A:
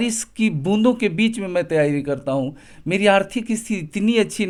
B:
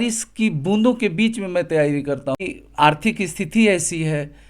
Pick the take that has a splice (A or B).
B